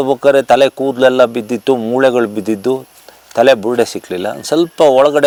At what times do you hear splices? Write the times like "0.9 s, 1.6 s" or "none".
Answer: none